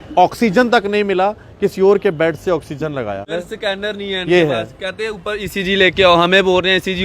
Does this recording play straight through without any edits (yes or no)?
no